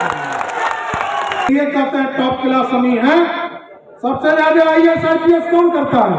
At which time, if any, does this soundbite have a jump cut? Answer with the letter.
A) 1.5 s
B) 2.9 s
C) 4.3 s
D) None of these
A